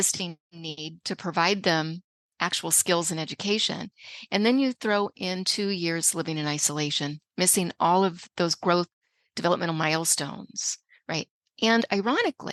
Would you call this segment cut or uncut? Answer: uncut